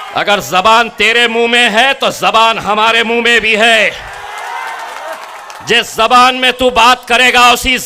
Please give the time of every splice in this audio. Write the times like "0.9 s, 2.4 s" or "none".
none